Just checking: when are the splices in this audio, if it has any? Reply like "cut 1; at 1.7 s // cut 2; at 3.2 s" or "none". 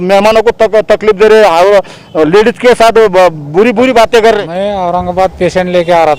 cut 1; at 4.4 s